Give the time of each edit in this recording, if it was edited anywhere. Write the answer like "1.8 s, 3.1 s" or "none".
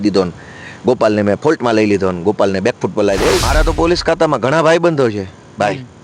3.5 s

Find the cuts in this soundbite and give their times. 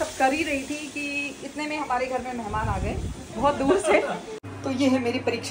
4.5 s

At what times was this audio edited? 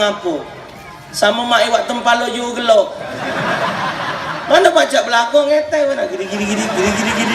none

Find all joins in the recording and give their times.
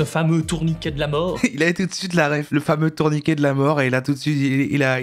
1.4 s, 2.4 s

